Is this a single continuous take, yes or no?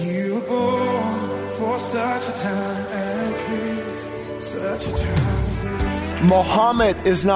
no